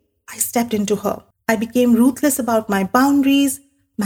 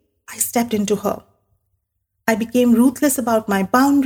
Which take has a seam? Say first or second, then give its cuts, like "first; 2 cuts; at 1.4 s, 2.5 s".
first; 1 cut; at 1.3 s